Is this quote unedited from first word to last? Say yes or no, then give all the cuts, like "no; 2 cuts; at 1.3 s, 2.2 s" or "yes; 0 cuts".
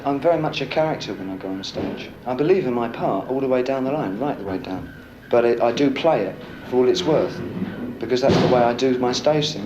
no; 1 cut; at 2.1 s